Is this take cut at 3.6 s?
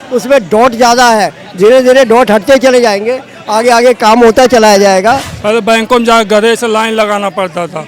no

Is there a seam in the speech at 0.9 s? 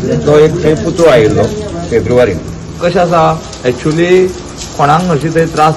no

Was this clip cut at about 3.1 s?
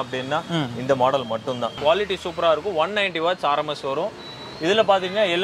no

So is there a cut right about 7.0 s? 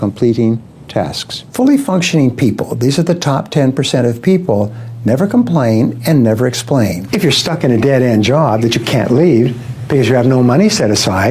yes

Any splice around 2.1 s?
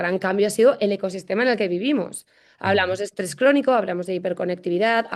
no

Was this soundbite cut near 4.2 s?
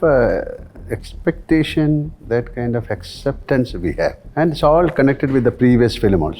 yes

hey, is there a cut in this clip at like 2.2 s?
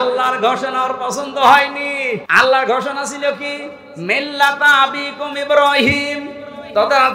yes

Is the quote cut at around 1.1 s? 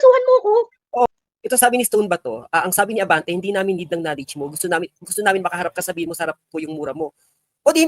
yes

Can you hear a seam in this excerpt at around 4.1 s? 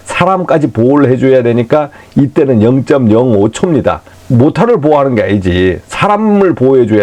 yes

